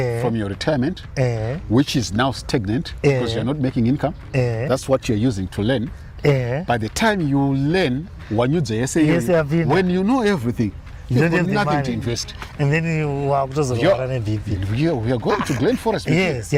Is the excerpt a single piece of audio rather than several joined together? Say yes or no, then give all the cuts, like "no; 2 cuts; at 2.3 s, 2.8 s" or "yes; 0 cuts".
yes; 0 cuts